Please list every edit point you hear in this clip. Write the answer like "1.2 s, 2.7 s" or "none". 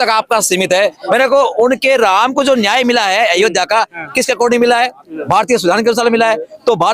1.0 s